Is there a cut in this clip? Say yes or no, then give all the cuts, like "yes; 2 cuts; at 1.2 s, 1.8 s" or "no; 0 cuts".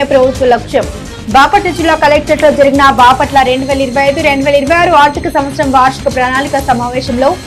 no; 0 cuts